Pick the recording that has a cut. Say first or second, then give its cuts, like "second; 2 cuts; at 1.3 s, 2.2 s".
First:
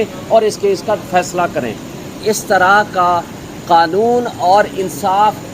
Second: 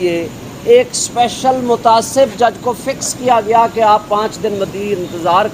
first; 1 cut; at 2.2 s